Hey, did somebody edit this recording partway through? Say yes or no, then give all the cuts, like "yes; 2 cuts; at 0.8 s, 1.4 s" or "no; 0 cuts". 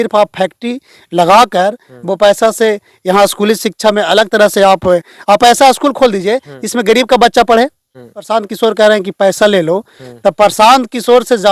yes; 1 cut; at 8.1 s